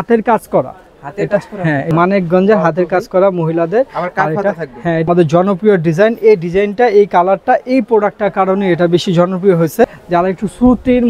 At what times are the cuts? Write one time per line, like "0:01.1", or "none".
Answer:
0:01.9
0:05.0
0:10.0